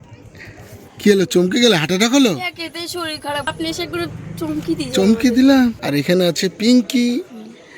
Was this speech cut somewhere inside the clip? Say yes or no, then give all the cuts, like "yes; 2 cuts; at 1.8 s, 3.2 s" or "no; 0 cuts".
yes; 2 cuts; at 3.5 s, 5.8 s